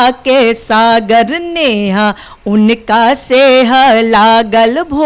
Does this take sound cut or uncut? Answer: uncut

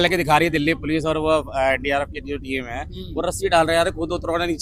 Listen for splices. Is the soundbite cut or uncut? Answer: uncut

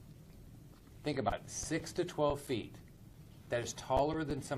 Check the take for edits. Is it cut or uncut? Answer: cut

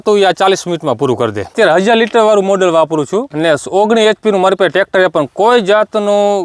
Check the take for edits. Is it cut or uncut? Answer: cut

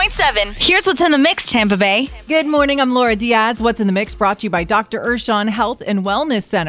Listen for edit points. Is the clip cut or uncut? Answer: cut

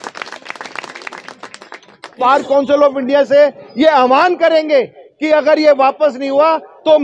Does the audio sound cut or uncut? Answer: cut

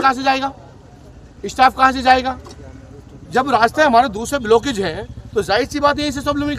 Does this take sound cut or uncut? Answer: uncut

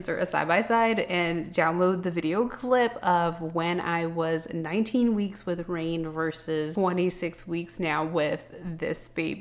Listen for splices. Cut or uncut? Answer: uncut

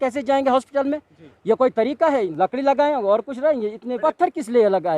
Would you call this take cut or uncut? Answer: cut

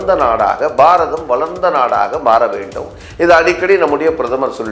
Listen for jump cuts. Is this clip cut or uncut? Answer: uncut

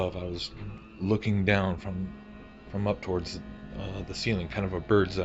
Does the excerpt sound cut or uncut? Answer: uncut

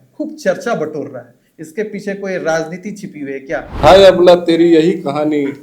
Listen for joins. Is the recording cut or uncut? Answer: cut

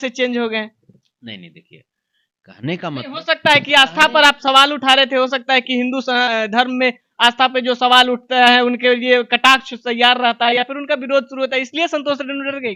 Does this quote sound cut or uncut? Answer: uncut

